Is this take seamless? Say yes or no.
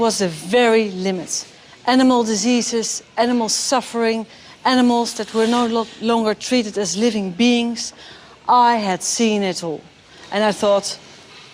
no